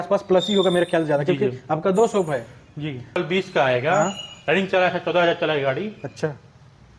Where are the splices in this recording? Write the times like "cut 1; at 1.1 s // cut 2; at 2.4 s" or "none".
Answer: cut 1; at 3.2 s